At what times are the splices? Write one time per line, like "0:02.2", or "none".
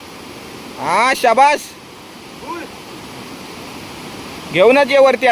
none